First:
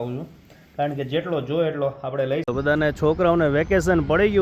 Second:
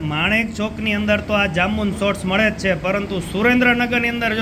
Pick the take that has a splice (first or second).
first